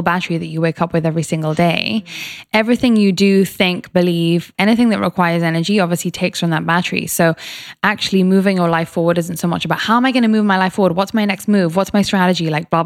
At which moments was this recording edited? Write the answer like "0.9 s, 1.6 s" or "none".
4.5 s